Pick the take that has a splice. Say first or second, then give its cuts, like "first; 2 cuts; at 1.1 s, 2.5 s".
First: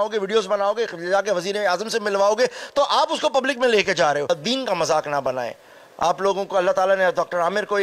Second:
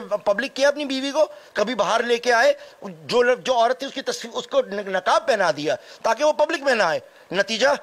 first; 1 cut; at 4.3 s